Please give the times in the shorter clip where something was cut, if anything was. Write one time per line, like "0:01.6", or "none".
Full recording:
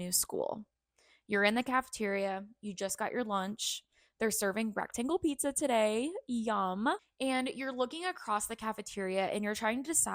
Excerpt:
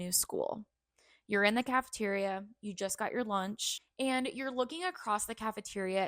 0:03.9